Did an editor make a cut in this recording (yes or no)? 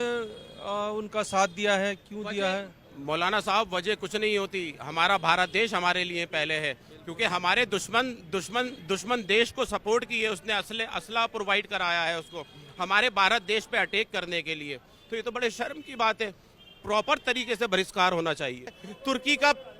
yes